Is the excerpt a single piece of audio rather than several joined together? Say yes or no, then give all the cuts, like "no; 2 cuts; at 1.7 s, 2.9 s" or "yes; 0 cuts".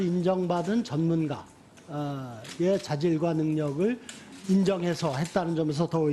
no; 1 cut; at 2.3 s